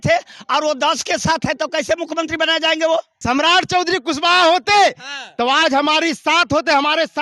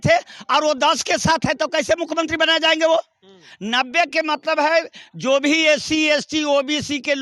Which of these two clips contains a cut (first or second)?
first